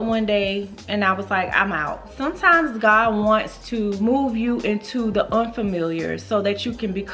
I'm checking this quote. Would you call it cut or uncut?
cut